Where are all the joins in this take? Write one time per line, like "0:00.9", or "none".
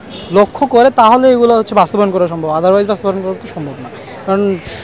none